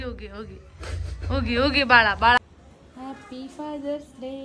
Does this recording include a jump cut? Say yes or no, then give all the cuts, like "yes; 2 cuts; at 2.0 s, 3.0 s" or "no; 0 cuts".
yes; 1 cut; at 2.4 s